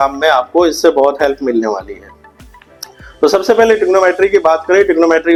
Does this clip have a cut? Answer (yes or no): no